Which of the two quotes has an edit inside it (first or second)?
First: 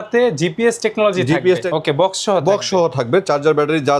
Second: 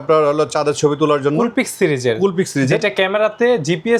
first